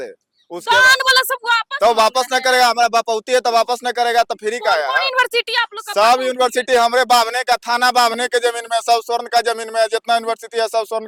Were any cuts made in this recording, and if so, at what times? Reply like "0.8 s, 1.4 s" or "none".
none